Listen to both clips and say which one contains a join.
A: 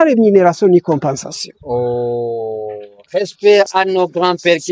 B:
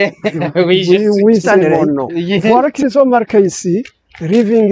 B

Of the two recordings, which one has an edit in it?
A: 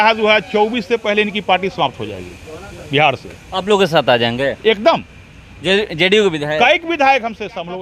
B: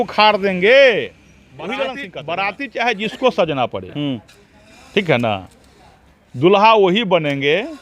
B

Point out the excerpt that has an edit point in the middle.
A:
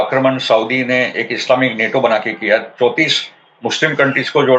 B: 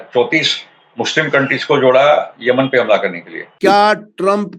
B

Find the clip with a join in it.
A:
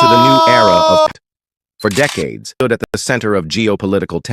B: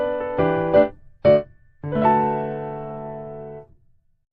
A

